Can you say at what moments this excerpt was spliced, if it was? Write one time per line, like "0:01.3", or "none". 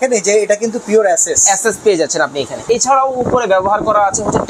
0:02.7

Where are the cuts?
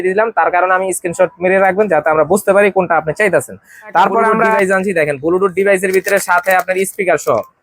0:04.5

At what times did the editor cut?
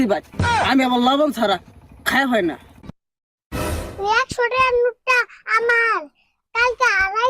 0:03.0

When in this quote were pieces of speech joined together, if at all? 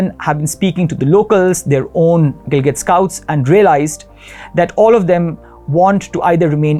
none

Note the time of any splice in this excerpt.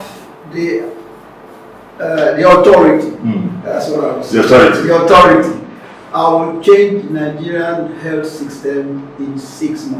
none

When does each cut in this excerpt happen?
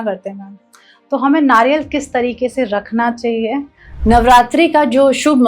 0:03.9

